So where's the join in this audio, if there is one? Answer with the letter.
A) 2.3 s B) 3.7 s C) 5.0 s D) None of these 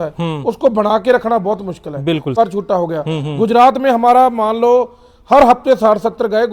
A